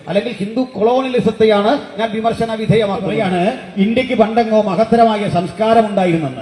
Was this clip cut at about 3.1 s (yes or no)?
yes